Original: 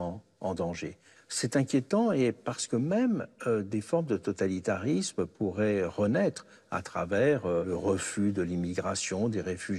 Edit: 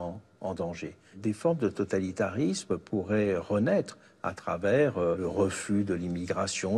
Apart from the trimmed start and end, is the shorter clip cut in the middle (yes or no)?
yes